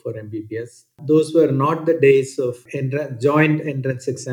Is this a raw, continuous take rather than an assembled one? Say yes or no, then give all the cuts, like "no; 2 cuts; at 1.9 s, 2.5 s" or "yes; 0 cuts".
no; 2 cuts; at 1.0 s, 2.6 s